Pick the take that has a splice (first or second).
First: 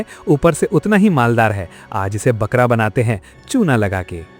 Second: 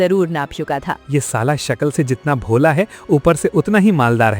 second